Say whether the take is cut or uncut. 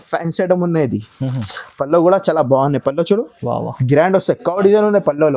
uncut